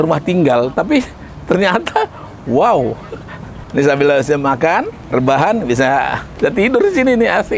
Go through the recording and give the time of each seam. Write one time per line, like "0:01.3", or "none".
0:03.6
0:05.0
0:06.2